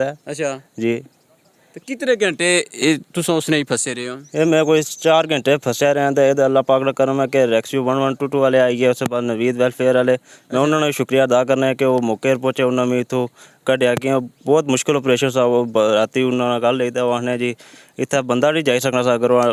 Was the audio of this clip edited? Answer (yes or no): no